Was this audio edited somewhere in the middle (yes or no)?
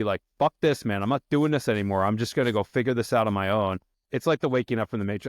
yes